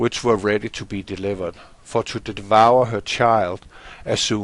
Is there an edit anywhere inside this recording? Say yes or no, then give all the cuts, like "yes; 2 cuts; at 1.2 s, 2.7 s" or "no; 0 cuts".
yes; 1 cut; at 3.0 s